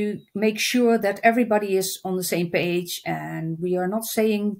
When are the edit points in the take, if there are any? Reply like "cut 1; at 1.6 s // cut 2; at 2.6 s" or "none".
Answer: none